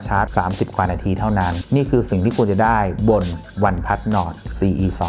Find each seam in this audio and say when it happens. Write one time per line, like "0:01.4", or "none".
none